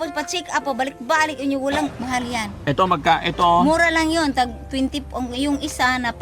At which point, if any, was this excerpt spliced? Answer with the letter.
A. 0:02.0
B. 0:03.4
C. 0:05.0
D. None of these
A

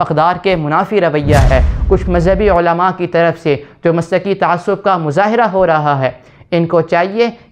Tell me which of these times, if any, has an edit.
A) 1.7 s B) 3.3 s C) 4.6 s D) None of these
A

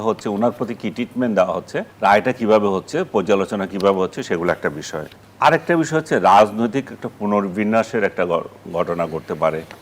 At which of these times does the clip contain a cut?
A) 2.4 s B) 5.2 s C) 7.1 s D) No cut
D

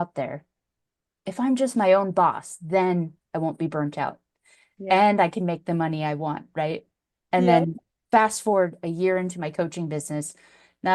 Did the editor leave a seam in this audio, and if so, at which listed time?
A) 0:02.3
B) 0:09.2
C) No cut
C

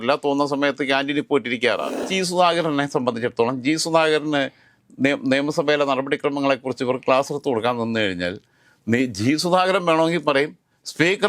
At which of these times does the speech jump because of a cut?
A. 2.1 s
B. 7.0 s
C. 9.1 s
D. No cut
A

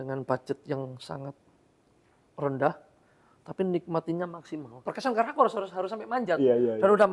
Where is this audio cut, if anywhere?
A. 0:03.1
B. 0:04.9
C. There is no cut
B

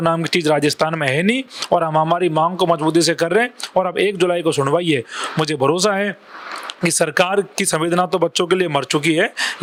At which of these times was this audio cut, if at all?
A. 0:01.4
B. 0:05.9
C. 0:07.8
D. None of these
D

